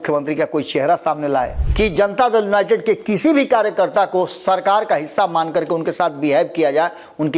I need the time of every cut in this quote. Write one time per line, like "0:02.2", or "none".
0:01.6